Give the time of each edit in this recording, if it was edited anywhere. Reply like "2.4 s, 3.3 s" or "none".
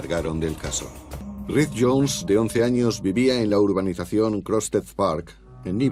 none